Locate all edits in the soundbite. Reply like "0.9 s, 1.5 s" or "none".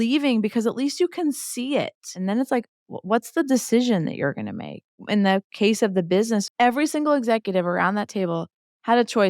2.1 s, 5.0 s, 6.5 s